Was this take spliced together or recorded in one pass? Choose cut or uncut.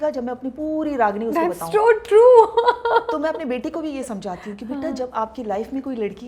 uncut